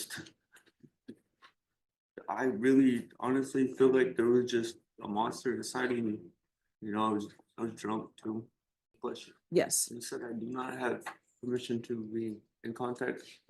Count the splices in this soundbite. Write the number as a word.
one